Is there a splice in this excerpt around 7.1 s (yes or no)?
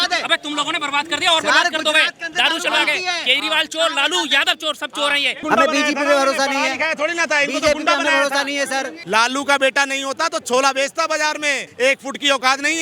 no